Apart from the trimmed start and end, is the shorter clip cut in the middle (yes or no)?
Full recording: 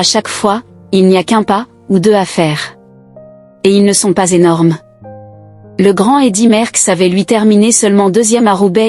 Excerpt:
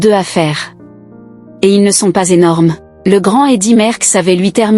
yes